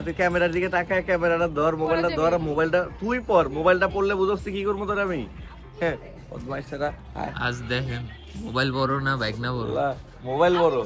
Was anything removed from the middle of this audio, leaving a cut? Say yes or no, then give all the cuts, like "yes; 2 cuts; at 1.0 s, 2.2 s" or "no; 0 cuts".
no; 0 cuts